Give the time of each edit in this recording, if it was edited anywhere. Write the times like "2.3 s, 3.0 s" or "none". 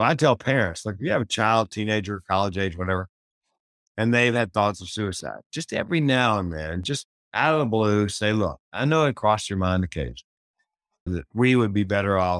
7.2 s, 11.1 s